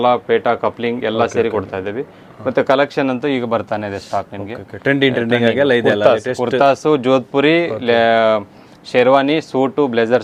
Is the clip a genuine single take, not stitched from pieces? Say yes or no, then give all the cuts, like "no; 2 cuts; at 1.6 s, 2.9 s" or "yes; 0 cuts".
yes; 0 cuts